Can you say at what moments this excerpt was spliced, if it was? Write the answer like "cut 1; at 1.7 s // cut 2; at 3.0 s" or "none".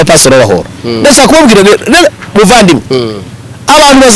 none